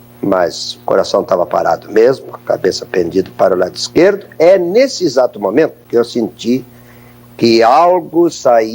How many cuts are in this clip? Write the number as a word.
one